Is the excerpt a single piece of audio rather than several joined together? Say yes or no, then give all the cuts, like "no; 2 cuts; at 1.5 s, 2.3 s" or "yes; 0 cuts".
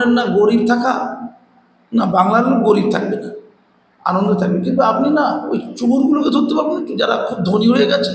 yes; 0 cuts